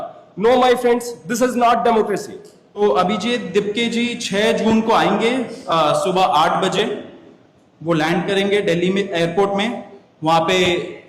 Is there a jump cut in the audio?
yes; 1 cut; at 2.8 s

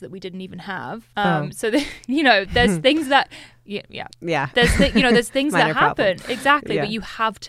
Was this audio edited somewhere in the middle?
yes; 1 cut; at 1.0 s

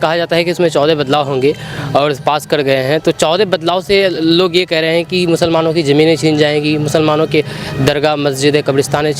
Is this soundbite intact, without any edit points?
yes; 0 cuts

